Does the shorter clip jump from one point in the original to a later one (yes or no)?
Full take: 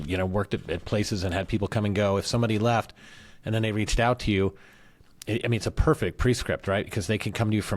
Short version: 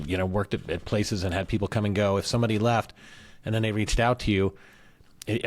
no